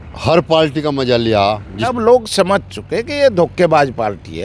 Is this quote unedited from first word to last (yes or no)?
no